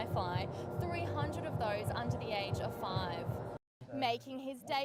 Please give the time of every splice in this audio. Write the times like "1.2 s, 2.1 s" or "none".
3.7 s